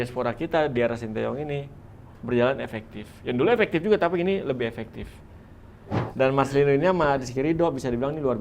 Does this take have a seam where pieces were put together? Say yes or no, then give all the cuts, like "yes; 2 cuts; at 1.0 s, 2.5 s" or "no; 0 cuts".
yes; 1 cut; at 6.0 s